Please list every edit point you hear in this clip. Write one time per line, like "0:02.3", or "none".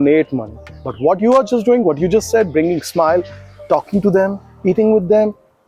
none